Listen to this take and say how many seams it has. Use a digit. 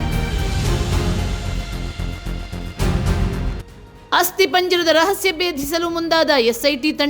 1